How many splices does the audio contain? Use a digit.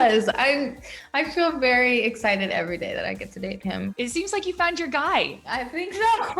2